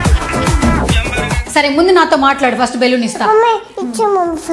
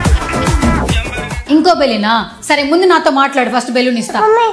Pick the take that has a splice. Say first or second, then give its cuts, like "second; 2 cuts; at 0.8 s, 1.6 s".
first; 1 cut; at 1.4 s